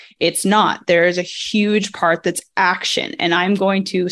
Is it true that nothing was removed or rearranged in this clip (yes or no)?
yes